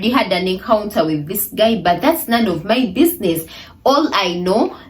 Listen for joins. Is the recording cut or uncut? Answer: uncut